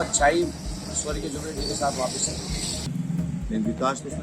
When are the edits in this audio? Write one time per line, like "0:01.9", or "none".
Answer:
0:02.8